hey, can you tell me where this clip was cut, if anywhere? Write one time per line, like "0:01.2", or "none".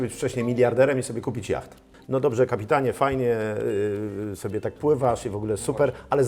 0:01.9